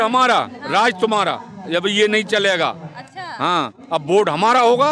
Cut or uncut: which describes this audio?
uncut